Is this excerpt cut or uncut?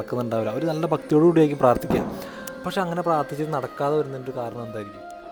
uncut